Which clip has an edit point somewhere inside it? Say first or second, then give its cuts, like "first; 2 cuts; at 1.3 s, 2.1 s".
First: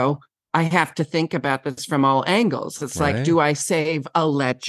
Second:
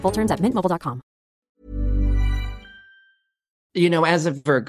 second; 2 cuts; at 1.4 s, 3.5 s